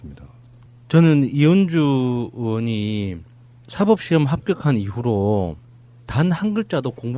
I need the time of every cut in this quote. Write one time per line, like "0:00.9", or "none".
0:01.8